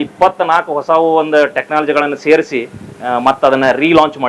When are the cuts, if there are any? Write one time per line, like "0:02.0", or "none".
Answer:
none